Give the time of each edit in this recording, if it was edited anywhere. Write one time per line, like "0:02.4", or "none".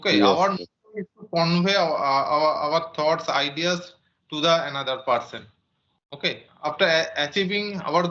0:06.5